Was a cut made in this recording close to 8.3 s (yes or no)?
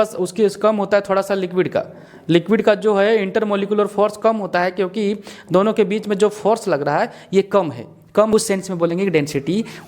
yes